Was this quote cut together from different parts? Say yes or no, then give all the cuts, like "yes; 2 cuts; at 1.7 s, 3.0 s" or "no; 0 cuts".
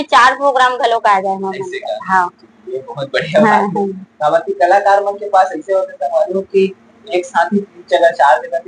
no; 0 cuts